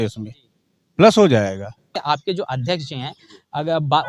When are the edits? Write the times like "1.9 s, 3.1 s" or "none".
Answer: 2.0 s